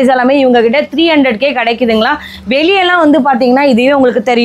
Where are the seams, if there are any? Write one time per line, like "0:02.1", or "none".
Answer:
none